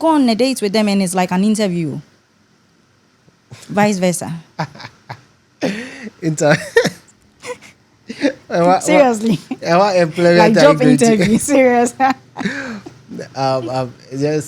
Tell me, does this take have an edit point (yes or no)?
no